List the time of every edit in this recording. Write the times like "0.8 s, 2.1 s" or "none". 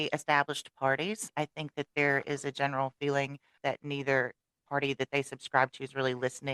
1.3 s, 3.5 s